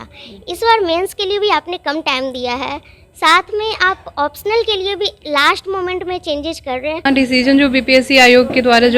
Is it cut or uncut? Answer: cut